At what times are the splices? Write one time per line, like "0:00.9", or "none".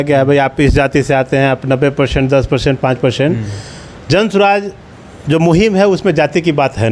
none